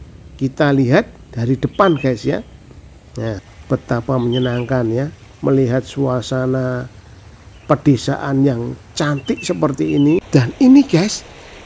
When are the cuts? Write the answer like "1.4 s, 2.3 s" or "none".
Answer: 3.5 s, 10.3 s

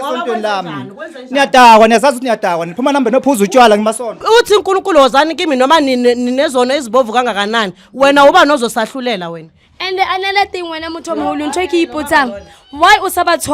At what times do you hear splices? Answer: 4.2 s

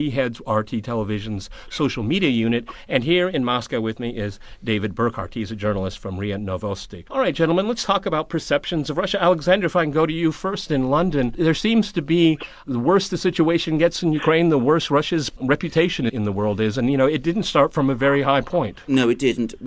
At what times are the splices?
none

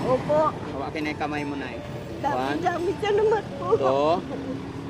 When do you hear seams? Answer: none

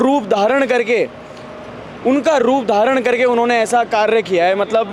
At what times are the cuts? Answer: none

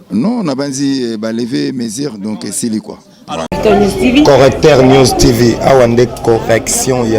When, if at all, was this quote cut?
3.5 s

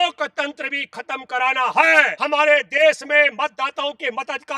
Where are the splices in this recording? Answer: 2.2 s

